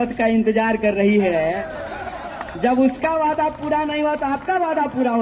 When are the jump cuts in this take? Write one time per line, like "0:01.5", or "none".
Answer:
none